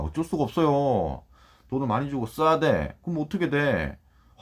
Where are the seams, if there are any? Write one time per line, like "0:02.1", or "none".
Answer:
none